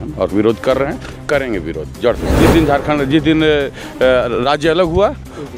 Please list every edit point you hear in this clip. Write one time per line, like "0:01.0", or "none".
0:02.4